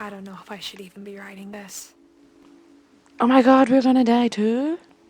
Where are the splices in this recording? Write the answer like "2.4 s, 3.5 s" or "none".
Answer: 2.5 s